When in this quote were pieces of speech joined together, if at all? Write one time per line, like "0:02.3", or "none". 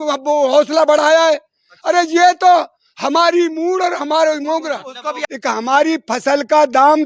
0:05.2